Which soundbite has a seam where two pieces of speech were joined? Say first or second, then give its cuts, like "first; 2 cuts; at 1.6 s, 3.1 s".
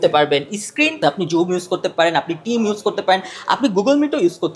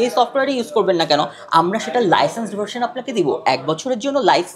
first; 1 cut; at 1.0 s